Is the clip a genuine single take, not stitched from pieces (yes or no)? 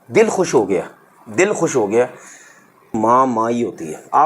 no